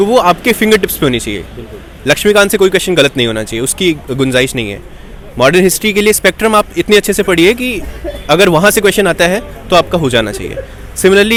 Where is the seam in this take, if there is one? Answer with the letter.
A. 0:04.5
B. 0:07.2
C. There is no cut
C